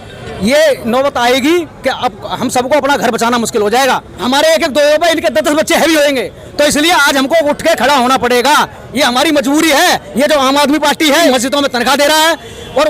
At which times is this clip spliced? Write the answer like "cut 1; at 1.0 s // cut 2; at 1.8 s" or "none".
cut 1; at 4.2 s // cut 2; at 10.1 s // cut 3; at 11.3 s